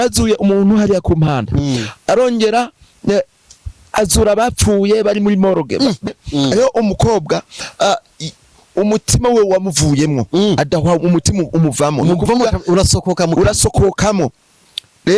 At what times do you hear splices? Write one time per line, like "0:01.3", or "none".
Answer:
0:06.0